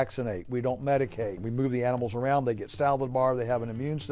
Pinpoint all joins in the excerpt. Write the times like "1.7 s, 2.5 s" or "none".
1.5 s